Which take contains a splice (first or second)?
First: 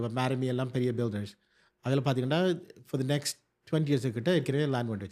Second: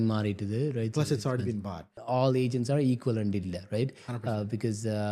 second